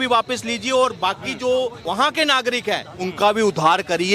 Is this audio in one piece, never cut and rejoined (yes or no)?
no